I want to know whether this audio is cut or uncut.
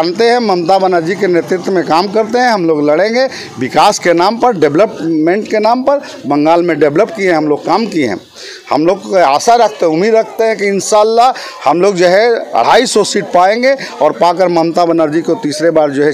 uncut